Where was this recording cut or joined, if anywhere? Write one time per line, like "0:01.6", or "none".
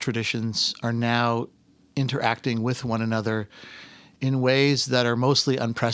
none